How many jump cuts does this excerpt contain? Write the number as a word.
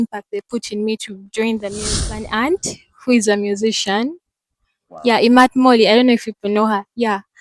one